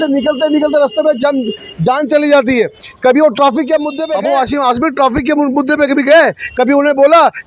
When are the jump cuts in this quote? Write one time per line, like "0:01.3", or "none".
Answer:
0:04.0